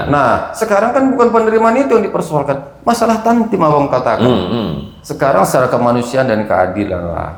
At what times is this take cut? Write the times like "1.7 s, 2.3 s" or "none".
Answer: none

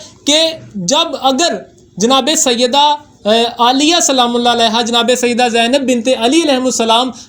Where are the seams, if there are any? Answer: none

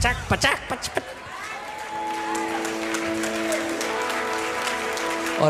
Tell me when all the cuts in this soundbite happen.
none

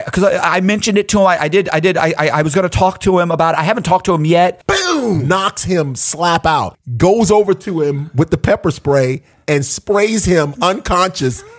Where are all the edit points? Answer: 5.0 s, 6.8 s

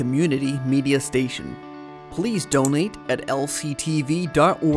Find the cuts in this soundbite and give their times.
none

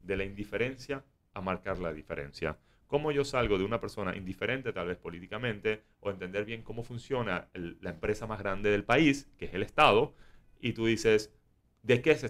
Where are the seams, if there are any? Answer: none

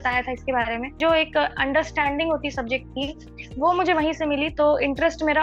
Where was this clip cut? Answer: 1.0 s

